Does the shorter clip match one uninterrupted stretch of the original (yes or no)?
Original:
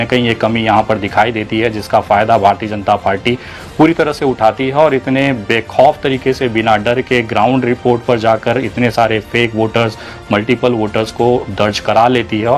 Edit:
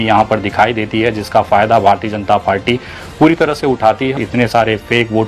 no